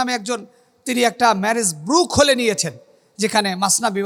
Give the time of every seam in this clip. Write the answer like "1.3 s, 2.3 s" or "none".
none